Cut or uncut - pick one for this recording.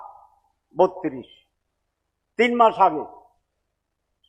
uncut